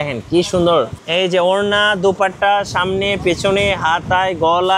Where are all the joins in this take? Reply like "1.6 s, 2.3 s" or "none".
1.0 s